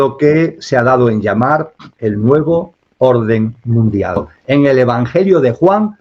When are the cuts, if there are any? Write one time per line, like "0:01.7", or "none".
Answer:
0:04.3